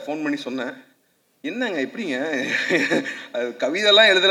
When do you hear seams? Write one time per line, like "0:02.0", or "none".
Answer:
none